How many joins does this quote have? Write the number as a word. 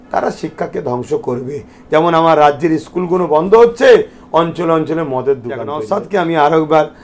one